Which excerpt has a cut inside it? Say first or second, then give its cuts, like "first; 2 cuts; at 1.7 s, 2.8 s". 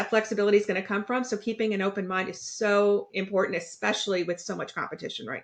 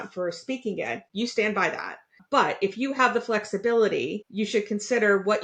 second; 2 cuts; at 1.0 s, 4.2 s